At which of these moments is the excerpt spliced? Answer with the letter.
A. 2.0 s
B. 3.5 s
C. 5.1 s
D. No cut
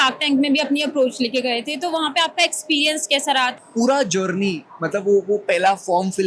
B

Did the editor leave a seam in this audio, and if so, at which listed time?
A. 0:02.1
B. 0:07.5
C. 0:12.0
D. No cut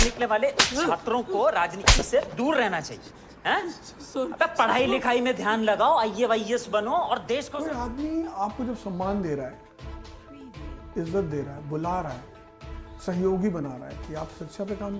B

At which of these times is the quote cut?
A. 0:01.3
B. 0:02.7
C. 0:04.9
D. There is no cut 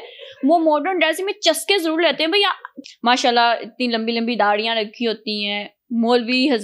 B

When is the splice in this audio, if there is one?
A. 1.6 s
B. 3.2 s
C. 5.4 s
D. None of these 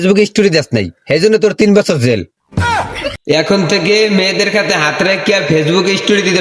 B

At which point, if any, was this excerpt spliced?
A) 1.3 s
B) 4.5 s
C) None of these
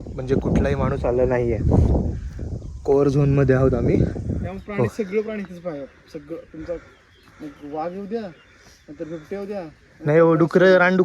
B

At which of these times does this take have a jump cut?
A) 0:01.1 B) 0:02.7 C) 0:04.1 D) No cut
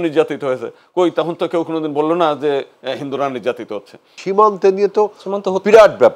C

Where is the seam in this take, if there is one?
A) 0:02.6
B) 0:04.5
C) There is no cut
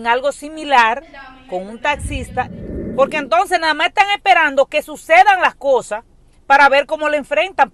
A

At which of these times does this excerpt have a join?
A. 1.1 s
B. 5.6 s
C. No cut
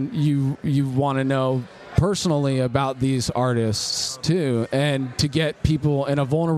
C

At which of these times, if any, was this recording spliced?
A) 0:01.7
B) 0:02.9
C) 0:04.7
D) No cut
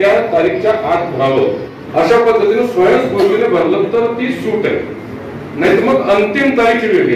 A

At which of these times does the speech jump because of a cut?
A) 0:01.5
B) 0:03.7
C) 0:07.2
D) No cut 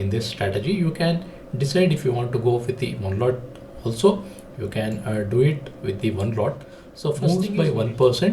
C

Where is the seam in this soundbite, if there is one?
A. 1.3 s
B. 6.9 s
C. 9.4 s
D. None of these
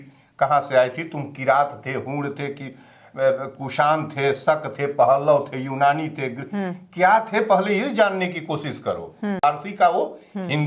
C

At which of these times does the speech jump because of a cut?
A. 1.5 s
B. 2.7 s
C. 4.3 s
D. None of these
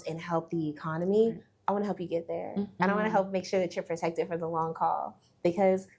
B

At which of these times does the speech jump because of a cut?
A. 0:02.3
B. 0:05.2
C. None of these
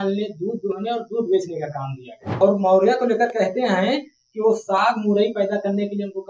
A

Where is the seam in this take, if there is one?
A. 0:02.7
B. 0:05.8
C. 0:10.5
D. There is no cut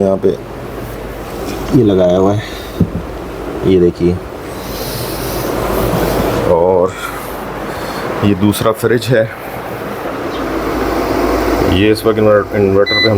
C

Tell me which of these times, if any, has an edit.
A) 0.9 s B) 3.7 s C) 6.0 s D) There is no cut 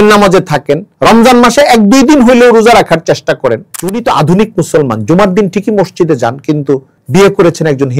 B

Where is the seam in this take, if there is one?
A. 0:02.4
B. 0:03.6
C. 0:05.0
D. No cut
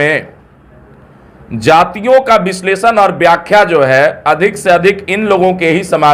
D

